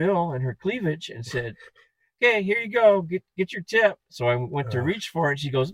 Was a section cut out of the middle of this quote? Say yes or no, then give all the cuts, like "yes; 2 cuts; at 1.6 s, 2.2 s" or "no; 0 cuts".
yes; 1 cut; at 1.0 s